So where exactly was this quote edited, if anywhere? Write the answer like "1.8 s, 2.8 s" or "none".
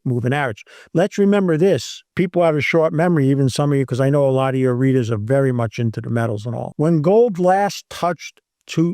2.0 s, 6.6 s